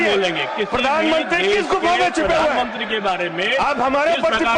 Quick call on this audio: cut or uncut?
uncut